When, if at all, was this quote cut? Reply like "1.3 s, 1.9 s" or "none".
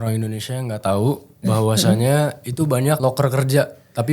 3.0 s